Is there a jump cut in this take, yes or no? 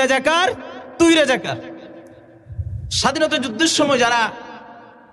no